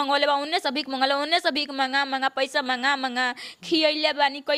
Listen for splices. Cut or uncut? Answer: uncut